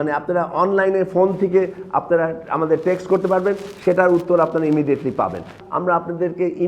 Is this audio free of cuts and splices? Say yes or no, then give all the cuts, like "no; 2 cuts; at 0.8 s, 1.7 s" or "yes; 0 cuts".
no; 1 cut; at 5.6 s